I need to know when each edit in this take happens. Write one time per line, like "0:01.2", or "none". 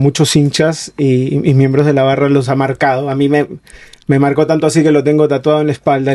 none